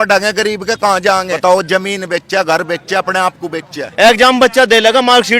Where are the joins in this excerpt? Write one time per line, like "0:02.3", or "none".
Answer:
0:01.3
0:03.8